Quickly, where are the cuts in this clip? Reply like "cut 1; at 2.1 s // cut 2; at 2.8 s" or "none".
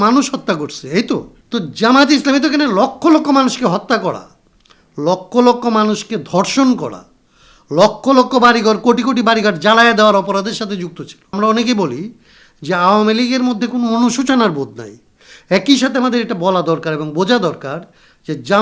cut 1; at 1.4 s // cut 2; at 11.3 s